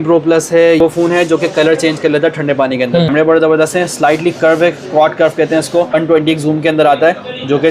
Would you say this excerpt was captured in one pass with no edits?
no; 3 cuts; at 0.8 s, 3.1 s, 5.9 s

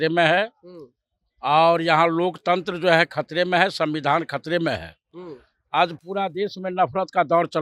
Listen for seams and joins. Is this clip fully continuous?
yes; 0 cuts

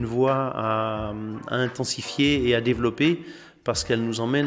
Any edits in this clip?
no; 0 cuts

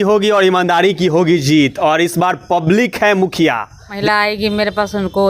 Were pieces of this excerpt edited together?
yes; 1 cut; at 4.0 s

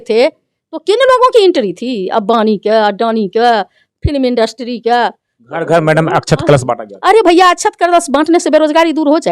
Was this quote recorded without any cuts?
yes; 0 cuts

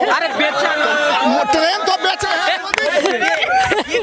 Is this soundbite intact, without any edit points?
yes; 0 cuts

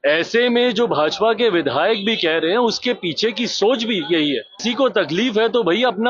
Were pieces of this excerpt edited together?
yes; 1 cut; at 4.6 s

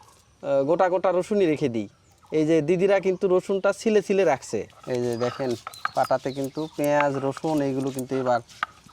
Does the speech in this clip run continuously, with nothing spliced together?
no; 1 cut; at 4.8 s

